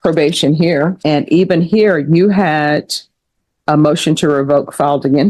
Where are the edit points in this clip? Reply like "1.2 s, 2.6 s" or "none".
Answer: 1.0 s